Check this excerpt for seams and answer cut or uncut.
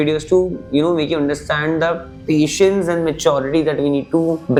uncut